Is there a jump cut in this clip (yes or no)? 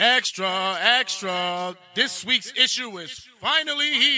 no